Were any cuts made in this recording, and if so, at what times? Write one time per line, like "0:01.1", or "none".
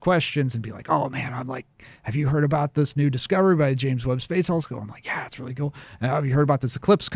none